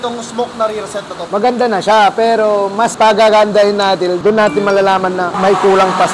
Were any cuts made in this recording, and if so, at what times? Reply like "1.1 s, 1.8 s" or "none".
1.2 s, 4.2 s